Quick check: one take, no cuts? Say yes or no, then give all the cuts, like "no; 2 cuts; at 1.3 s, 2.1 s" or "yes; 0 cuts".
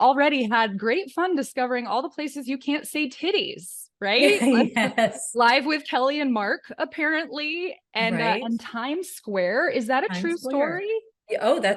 yes; 0 cuts